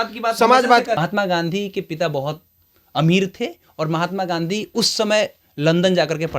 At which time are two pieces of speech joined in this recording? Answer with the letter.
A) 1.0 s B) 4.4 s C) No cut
A